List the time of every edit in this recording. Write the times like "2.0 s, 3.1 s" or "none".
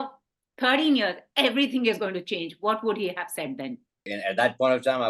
4.1 s